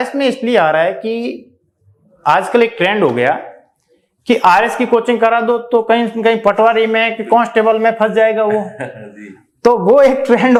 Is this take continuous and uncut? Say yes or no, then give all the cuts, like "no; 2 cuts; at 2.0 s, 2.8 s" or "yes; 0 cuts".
yes; 0 cuts